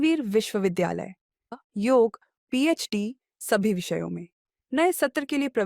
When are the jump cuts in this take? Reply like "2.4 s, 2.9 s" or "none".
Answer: 1.5 s